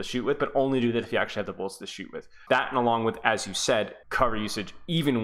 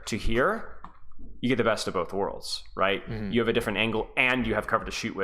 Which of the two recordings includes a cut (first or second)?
first